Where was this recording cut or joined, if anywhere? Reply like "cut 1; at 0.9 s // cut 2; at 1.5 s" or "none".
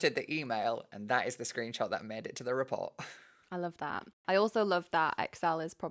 cut 1; at 4.1 s

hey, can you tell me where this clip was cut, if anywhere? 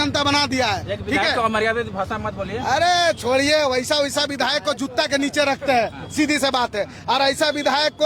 none

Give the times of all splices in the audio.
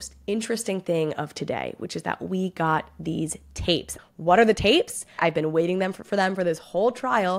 cut 1; at 4.0 s // cut 2; at 5.2 s

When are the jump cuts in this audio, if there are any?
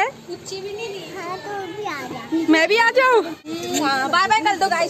cut 1; at 3.5 s

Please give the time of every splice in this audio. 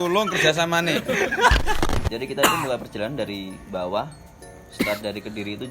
cut 1; at 2.0 s

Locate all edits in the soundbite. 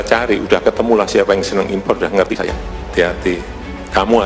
cut 1; at 2.8 s

